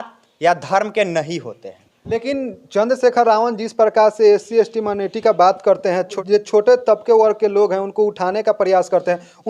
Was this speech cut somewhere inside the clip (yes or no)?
yes